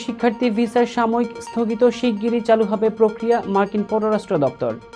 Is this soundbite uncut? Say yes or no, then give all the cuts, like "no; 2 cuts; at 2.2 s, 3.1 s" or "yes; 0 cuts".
yes; 0 cuts